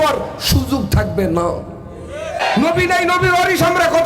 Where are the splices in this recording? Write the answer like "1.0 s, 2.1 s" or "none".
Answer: 2.4 s